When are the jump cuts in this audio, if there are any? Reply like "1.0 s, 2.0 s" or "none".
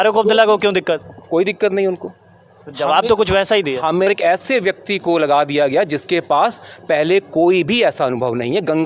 4.1 s